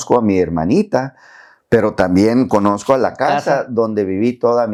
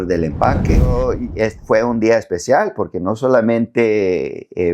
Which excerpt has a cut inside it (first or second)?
second